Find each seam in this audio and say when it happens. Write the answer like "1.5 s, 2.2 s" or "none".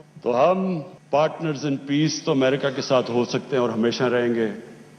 0.9 s